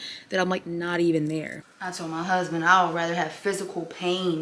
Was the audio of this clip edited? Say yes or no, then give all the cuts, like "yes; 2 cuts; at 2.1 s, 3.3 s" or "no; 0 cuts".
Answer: yes; 1 cut; at 1.6 s